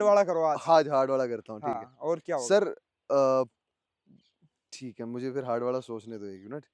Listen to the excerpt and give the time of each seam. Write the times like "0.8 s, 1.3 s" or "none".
none